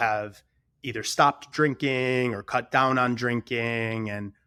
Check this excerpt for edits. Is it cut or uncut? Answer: uncut